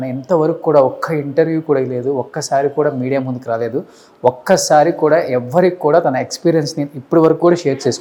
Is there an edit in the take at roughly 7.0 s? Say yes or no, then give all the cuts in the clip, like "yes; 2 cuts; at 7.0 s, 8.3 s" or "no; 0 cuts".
no; 0 cuts